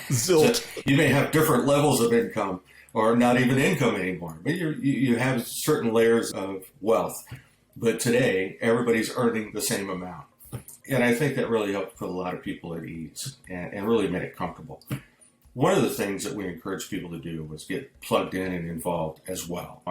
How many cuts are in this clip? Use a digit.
1